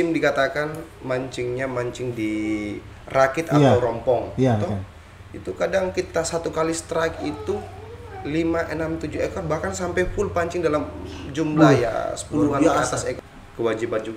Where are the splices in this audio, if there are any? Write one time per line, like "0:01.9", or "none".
0:13.2